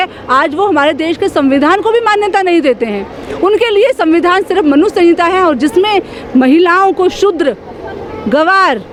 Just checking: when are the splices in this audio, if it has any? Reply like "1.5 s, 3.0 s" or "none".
none